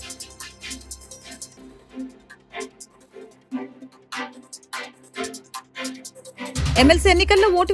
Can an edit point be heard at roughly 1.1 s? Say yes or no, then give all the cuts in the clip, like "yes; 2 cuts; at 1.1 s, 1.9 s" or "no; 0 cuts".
yes; 1 cut; at 1.1 s